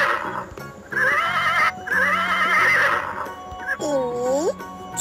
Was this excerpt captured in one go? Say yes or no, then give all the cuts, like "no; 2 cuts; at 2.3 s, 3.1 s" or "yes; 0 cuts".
yes; 0 cuts